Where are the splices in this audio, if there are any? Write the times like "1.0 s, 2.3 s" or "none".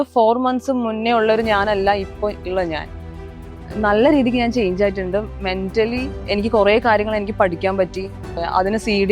6.1 s, 8.4 s